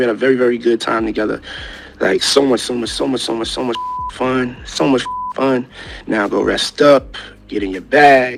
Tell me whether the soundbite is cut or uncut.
uncut